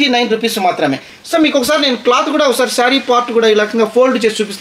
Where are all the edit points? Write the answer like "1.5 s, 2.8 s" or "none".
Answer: 1.1 s